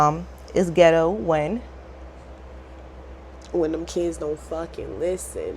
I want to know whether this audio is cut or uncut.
uncut